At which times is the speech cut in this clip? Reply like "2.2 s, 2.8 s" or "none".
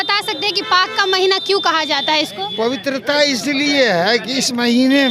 none